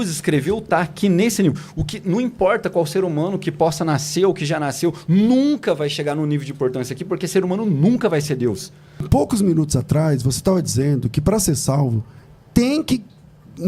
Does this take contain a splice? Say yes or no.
yes